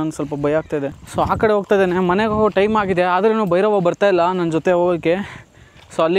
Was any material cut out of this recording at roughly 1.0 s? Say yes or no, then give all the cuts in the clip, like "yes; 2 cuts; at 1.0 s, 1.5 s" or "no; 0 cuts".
yes; 1 cut; at 1.0 s